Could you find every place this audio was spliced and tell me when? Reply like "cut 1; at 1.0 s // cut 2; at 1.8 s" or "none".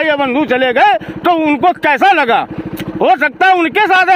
none